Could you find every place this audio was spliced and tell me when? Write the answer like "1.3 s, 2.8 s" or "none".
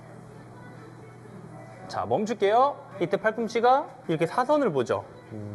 2.8 s, 3.9 s